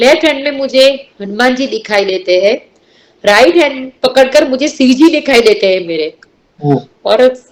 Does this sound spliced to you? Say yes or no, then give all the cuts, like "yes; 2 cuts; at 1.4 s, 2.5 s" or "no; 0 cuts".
no; 0 cuts